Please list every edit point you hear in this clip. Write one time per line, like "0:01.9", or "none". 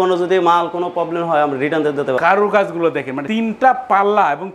0:02.2
0:03.2